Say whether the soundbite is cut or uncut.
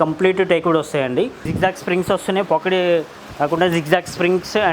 cut